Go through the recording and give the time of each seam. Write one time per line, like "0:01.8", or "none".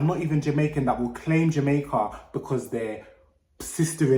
none